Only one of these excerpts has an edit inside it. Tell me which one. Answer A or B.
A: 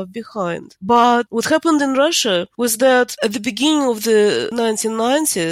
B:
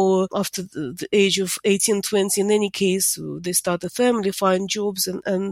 A